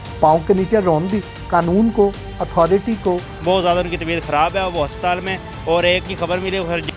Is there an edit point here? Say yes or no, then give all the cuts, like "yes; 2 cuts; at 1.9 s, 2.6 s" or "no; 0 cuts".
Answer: yes; 1 cut; at 3.3 s